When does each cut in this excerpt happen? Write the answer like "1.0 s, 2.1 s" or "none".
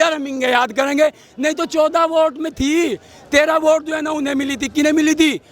none